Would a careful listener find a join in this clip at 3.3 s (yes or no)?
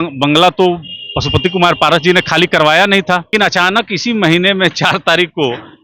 yes